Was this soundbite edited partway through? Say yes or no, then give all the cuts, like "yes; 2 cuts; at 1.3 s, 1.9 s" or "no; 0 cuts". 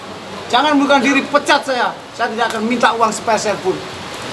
no; 0 cuts